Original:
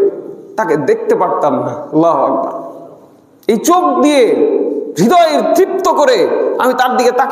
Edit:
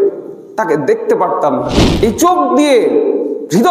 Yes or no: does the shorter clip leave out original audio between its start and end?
yes